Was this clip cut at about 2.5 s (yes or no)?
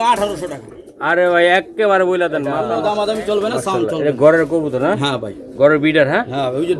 yes